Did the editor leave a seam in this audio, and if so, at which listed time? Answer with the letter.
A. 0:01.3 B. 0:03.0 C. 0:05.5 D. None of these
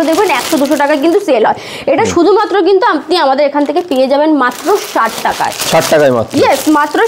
D